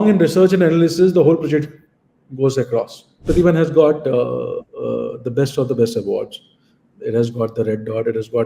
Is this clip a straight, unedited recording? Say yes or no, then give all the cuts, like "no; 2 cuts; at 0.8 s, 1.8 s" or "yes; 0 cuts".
no; 1 cut; at 3.2 s